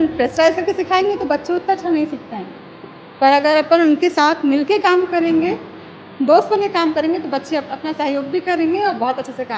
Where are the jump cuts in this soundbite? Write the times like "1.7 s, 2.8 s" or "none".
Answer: none